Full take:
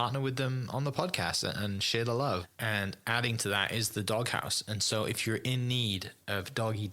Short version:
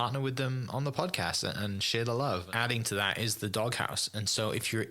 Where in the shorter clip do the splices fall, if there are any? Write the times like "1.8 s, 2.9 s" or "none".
2.5 s